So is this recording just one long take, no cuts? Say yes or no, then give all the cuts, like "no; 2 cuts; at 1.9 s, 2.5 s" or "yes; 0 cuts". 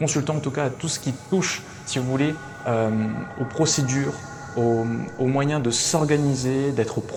yes; 0 cuts